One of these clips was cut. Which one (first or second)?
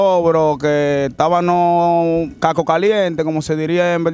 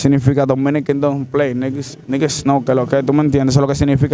first